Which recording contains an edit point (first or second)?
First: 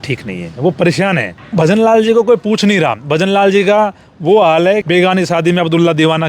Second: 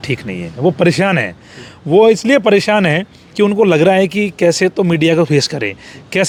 first